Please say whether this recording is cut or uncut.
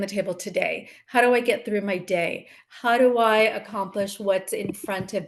uncut